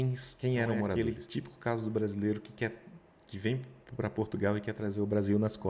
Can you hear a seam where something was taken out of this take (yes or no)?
yes